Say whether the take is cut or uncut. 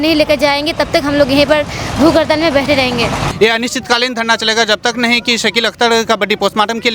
cut